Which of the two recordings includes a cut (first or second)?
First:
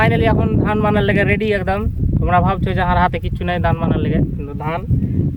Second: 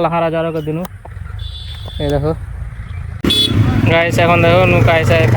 second